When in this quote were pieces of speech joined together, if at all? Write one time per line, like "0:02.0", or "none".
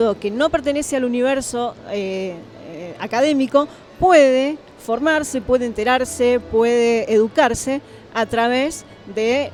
none